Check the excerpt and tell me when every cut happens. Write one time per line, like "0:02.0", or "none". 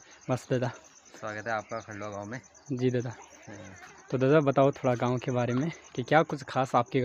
none